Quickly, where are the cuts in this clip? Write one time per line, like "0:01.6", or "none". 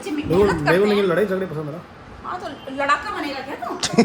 none